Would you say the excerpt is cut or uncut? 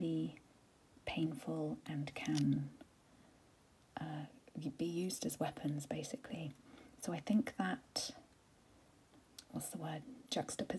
uncut